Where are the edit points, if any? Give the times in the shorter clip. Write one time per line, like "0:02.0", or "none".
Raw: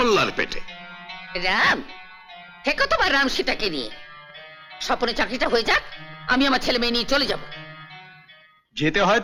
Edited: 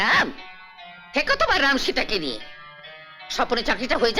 none